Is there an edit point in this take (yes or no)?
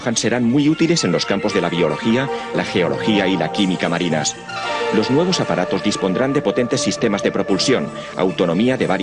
yes